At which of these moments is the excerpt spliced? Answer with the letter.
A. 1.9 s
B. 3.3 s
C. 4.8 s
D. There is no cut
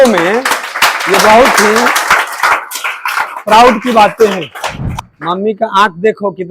C